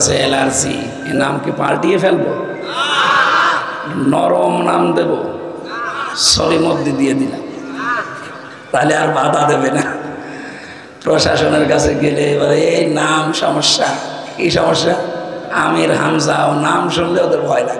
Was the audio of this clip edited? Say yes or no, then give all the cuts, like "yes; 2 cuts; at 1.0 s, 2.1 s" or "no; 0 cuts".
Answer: no; 0 cuts